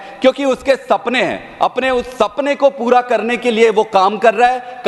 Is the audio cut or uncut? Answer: uncut